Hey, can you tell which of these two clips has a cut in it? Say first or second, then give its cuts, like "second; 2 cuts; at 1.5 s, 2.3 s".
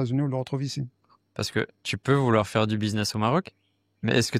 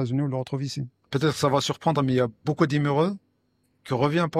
second; 1 cut; at 1.1 s